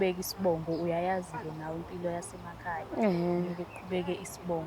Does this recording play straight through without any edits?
yes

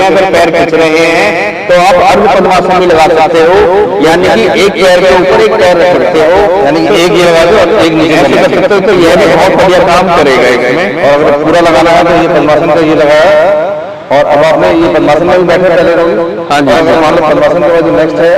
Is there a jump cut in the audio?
no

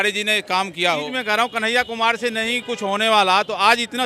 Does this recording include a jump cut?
yes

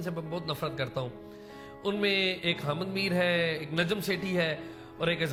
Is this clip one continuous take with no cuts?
yes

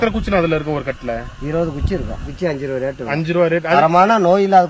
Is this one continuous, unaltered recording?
no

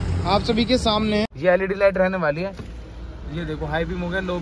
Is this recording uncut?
no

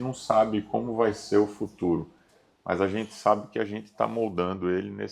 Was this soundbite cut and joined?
no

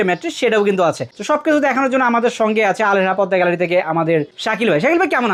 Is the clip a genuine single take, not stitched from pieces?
yes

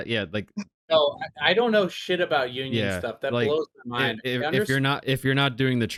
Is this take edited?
no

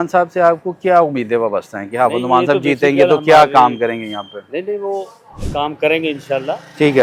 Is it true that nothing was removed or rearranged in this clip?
yes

